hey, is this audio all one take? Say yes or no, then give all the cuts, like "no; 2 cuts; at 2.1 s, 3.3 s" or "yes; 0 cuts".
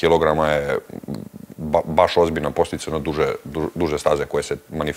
yes; 0 cuts